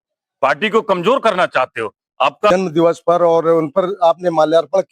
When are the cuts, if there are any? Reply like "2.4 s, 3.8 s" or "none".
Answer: 2.5 s